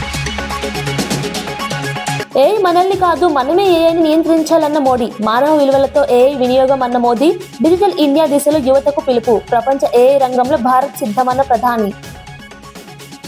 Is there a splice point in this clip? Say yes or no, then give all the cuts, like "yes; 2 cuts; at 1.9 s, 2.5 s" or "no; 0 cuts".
yes; 1 cut; at 2.2 s